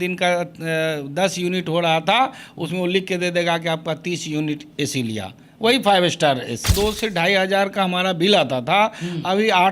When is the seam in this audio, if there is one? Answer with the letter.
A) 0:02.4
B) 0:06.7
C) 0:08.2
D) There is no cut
B